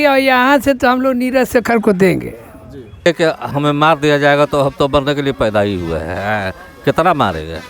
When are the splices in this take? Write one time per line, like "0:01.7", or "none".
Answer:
0:03.1